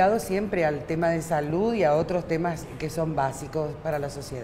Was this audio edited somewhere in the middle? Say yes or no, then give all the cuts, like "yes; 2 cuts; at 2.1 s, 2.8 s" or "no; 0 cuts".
yes; 1 cut; at 2.2 s